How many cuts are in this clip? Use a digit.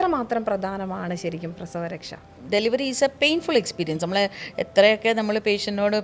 1